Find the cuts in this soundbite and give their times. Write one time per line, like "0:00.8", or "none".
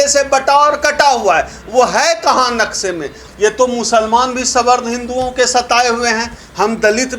0:03.2